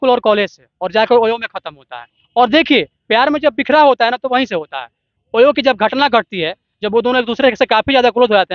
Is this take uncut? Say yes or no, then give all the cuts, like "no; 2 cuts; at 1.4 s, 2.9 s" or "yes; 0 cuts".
yes; 0 cuts